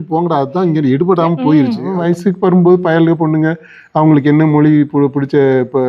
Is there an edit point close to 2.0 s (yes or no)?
yes